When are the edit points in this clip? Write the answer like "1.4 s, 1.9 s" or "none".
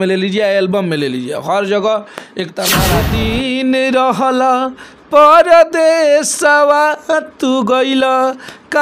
3.0 s